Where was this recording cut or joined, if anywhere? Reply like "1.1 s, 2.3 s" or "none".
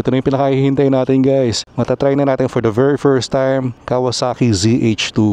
1.7 s, 3.8 s